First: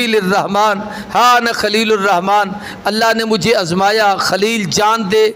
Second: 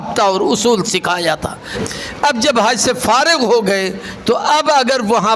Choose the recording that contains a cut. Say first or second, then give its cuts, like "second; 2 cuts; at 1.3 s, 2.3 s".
second; 1 cut; at 1.7 s